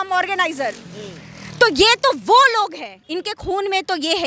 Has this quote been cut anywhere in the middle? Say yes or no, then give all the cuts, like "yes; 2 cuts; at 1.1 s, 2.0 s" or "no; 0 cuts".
no; 0 cuts